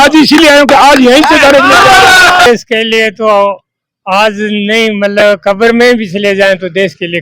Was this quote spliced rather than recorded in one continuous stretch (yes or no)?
yes